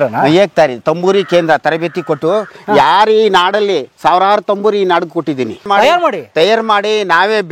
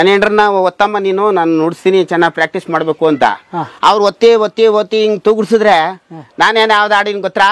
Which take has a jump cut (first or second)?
first